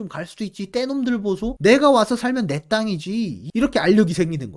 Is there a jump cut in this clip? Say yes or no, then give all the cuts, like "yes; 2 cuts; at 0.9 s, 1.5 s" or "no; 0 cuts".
yes; 1 cut; at 3.4 s